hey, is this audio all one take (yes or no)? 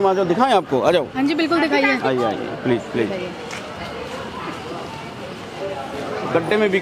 yes